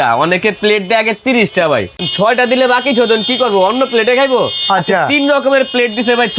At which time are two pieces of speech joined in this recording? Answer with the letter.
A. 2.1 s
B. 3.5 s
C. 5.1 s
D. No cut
A